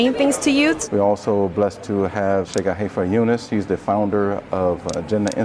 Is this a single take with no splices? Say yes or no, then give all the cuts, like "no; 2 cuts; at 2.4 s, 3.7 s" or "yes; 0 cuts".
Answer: no; 2 cuts; at 2.5 s, 3.4 s